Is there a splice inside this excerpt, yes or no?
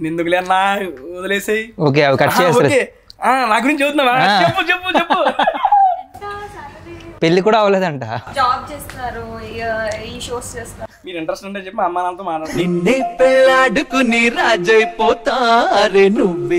yes